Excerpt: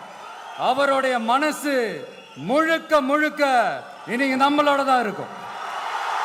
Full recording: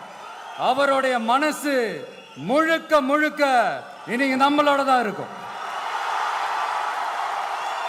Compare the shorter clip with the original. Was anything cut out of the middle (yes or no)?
no